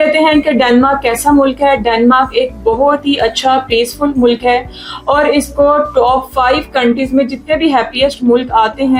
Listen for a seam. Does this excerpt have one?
no; 0 cuts

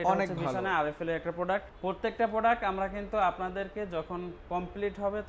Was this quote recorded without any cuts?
no; 1 cut; at 1.7 s

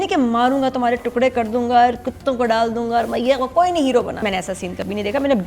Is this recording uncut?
no; 1 cut; at 4.2 s

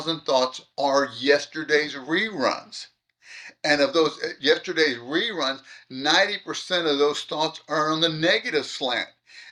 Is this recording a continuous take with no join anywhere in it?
yes; 0 cuts

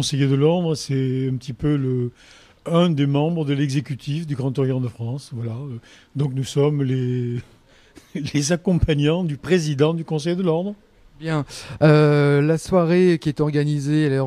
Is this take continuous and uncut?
no; 1 cut; at 11.1 s

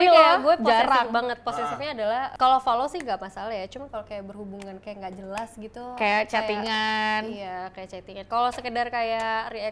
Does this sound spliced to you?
yes; 1 cut; at 2.3 s

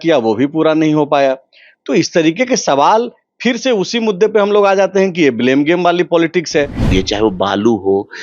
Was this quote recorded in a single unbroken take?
no; 1 cut; at 6.8 s

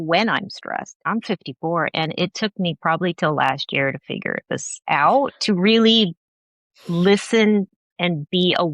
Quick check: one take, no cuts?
no; 1 cut; at 0.9 s

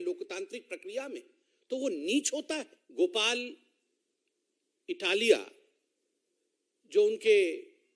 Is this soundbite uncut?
no; 1 cut; at 2.8 s

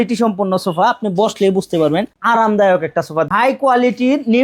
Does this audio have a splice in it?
yes; 2 cuts; at 2.1 s, 3.3 s

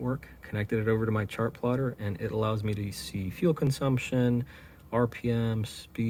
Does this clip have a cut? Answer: no; 0 cuts

